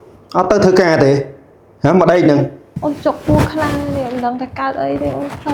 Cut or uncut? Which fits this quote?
cut